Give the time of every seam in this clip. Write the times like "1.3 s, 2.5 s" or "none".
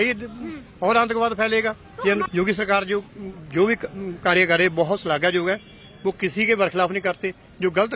2.3 s